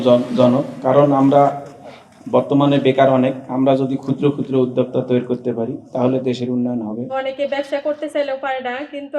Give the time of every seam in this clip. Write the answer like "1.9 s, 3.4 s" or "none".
none